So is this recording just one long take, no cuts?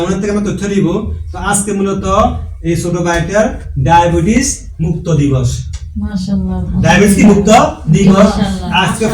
yes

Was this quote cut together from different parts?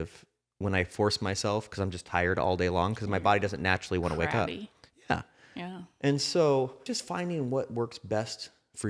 yes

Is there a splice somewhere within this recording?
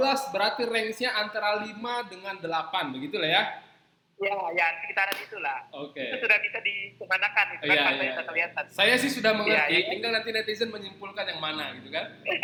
no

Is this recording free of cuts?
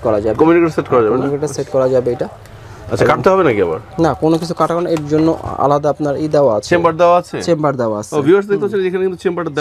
yes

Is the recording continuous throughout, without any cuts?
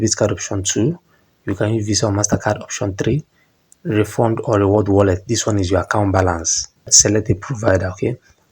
no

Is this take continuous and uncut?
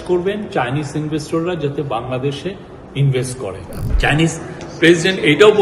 no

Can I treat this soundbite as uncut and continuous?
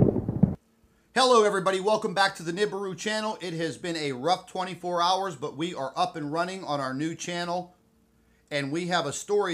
yes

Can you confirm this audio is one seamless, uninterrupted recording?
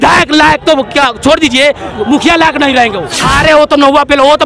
no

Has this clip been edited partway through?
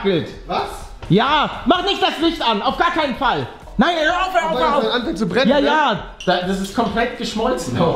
yes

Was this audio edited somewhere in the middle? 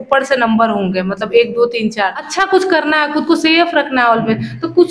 yes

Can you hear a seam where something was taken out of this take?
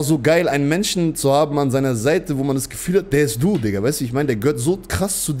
no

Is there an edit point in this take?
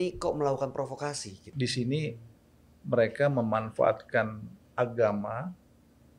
yes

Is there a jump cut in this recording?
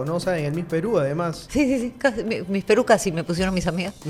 no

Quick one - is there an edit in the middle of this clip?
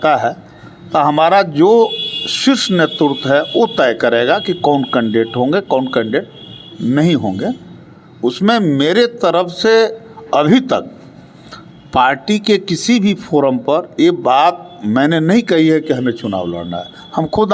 no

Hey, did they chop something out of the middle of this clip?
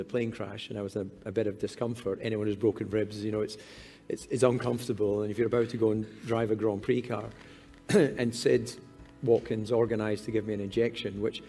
no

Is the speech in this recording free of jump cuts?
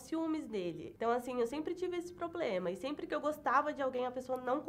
yes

